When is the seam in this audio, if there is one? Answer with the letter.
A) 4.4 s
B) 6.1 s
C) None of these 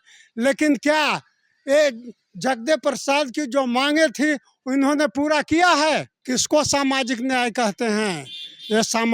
B